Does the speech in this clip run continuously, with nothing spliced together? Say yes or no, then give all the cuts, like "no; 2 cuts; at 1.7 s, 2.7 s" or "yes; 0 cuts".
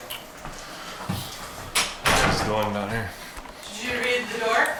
yes; 0 cuts